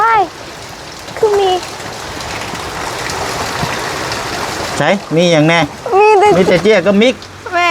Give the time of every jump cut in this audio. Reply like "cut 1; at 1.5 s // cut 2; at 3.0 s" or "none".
cut 1; at 6.3 s